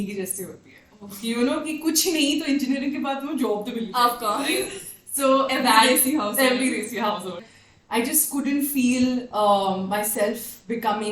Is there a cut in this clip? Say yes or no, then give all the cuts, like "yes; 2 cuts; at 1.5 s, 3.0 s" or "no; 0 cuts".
yes; 1 cut; at 7.4 s